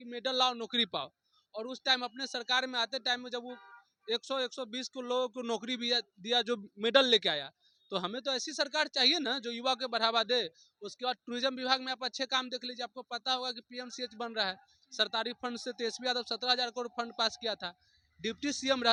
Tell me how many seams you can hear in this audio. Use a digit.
0